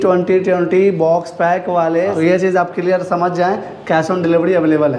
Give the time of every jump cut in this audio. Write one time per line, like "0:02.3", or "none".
0:02.1